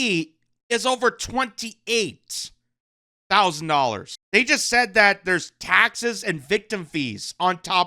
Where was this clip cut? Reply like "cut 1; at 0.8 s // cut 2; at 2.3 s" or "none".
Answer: cut 1; at 4.1 s

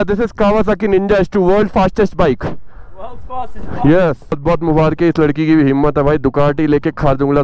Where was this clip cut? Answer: cut 1; at 4.4 s

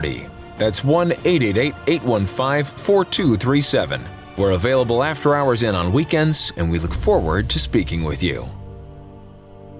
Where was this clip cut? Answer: cut 1; at 8.5 s

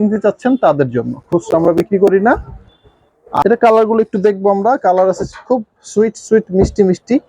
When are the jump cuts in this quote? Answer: cut 1; at 3.4 s

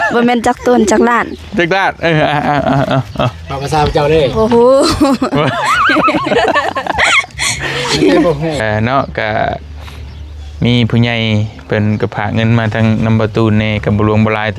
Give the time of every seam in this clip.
cut 1; at 8.6 s

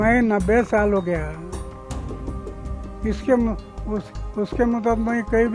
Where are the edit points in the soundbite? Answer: cut 1; at 1.4 s // cut 2; at 3.0 s

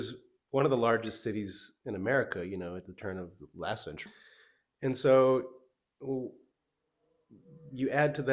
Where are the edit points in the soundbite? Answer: cut 1; at 4.0 s

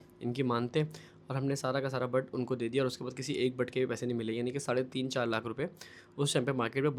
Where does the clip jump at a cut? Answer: none

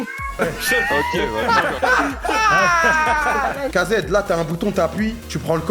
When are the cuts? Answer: cut 1; at 3.7 s

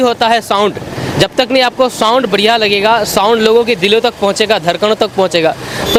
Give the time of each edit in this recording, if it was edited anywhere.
none

